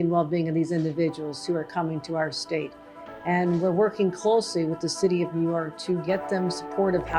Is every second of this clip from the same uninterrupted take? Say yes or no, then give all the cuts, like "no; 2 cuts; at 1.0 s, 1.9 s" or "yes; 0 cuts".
yes; 0 cuts